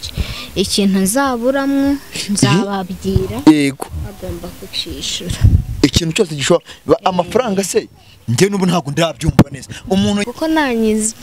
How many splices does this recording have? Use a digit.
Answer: 1